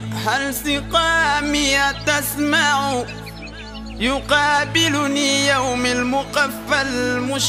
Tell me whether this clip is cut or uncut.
uncut